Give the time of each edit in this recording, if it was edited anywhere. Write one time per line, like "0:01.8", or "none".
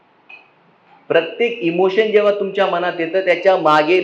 none

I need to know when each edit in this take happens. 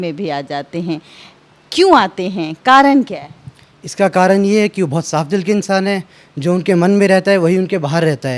none

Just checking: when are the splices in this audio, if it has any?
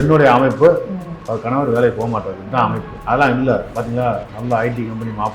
0:02.9

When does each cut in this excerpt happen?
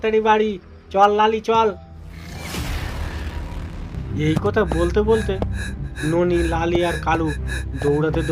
none

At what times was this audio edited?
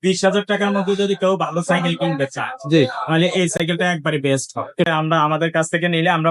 0:04.8

